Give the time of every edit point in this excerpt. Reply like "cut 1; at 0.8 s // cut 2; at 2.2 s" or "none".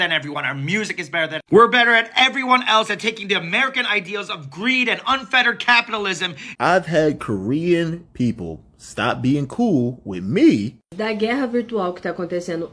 cut 1; at 6.5 s // cut 2; at 10.9 s